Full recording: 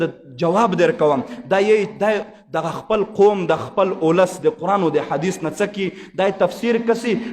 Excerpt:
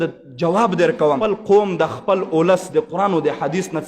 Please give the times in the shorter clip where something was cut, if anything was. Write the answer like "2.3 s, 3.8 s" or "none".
1.2 s